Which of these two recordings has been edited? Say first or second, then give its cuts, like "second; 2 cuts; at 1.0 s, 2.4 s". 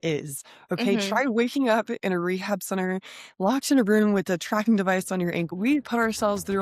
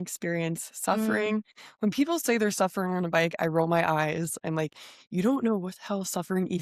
first; 1 cut; at 5.5 s